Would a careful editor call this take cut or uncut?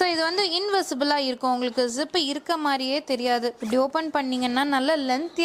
uncut